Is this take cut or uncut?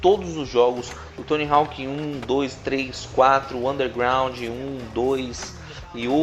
cut